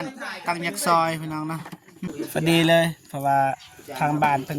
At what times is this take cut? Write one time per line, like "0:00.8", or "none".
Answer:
0:02.0